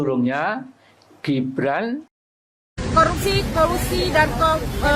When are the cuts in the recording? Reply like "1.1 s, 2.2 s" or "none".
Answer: 2.3 s